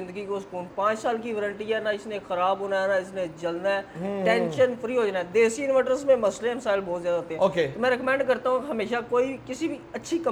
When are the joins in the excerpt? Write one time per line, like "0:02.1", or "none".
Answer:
none